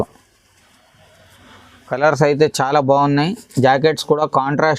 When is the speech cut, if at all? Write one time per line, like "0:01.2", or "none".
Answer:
0:01.9